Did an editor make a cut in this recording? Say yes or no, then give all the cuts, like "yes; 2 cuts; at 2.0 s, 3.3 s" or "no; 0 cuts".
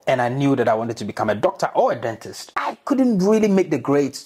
yes; 1 cut; at 2.5 s